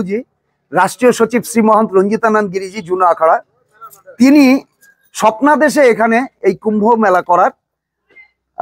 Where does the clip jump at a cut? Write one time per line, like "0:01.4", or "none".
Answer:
none